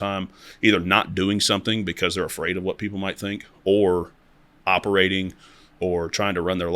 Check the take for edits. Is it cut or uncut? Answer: uncut